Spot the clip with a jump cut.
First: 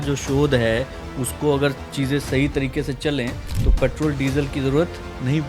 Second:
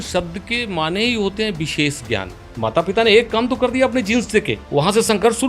second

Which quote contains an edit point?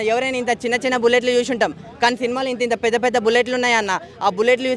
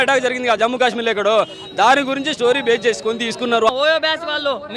second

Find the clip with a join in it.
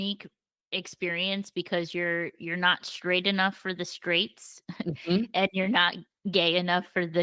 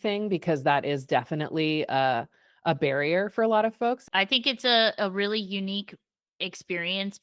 second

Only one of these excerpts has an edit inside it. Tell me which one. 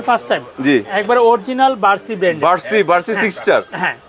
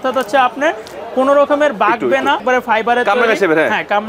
second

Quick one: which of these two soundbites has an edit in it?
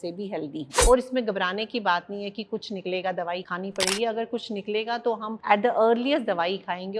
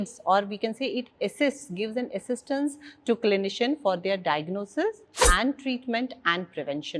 first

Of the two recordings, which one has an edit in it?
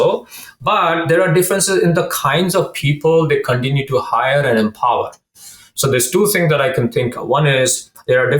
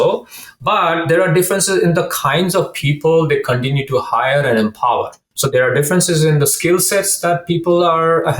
second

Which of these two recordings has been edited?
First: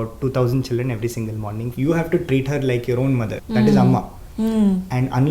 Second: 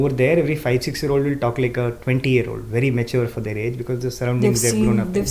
first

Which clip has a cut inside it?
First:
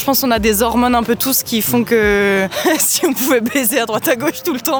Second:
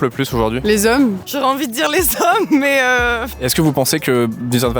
second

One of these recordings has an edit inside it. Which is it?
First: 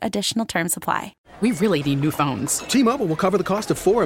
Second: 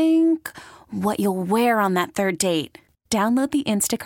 first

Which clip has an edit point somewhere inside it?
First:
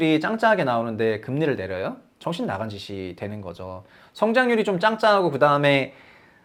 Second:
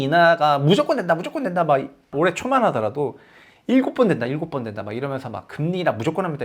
second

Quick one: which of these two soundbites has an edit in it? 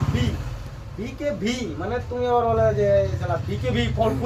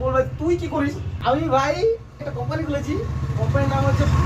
second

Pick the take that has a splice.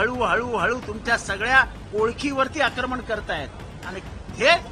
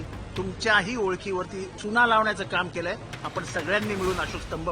second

